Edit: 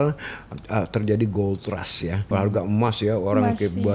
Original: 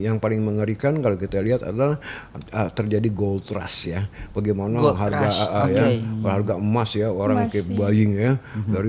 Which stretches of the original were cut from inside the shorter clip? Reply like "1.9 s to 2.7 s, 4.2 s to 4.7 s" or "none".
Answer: 4.1 s to 6.2 s